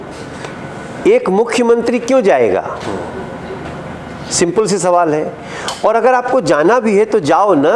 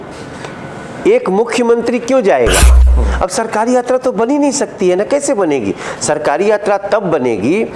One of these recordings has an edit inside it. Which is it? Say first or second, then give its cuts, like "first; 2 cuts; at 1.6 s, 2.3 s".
second; 1 cut; at 2.8 s